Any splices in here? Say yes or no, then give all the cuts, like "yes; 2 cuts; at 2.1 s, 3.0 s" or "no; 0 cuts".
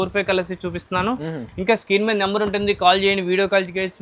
no; 0 cuts